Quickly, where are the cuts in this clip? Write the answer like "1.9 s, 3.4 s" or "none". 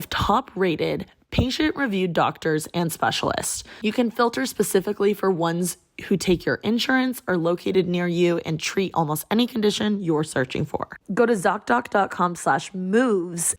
10.9 s